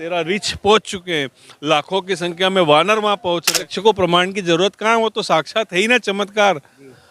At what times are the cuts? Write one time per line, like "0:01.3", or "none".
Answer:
0:03.5